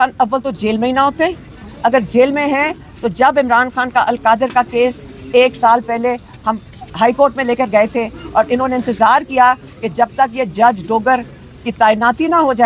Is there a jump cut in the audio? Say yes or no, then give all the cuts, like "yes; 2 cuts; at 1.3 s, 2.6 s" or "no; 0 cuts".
no; 0 cuts